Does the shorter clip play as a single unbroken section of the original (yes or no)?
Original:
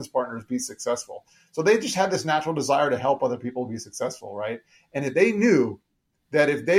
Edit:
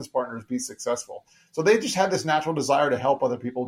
yes